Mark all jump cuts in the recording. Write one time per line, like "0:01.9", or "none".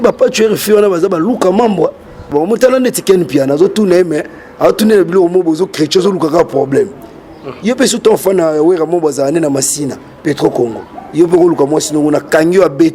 0:02.3

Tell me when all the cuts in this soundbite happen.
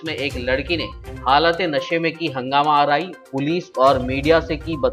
none

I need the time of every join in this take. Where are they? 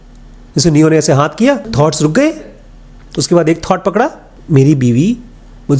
0:01.7
0:04.3

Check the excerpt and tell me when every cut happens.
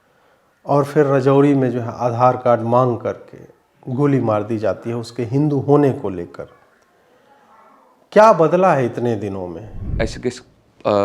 0:09.9

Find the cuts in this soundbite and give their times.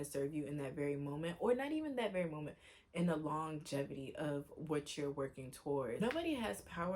0:06.0

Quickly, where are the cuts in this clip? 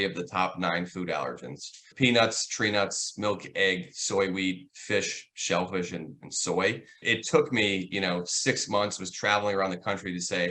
0:01.9
0:07.0

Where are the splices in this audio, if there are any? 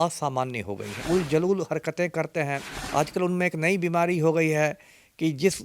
0:01.0
0:02.7

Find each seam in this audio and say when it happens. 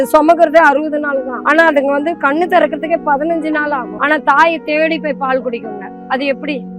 0:01.3
0:03.9

